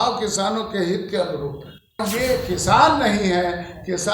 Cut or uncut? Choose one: cut